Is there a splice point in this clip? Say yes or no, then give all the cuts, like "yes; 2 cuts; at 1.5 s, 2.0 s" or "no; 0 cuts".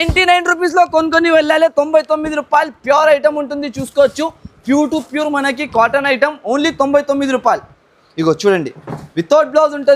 no; 0 cuts